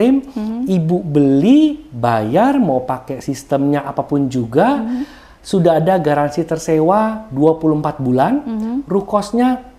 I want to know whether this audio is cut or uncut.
uncut